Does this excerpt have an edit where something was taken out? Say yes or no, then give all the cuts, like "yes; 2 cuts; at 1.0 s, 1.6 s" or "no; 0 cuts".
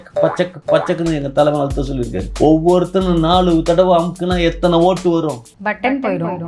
yes; 1 cut; at 2.2 s